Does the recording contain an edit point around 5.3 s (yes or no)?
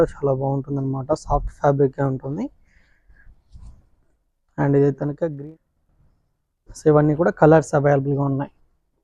yes